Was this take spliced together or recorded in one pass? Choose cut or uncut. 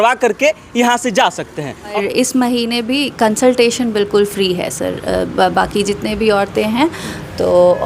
cut